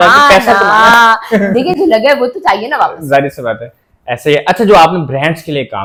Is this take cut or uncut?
uncut